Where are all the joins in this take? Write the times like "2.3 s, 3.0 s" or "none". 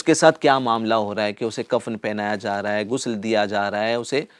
none